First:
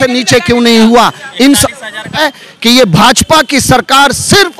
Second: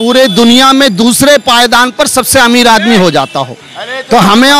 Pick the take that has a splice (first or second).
first